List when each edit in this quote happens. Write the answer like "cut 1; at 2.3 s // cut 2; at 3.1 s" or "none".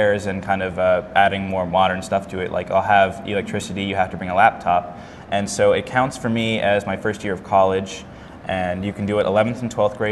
cut 1; at 4.5 s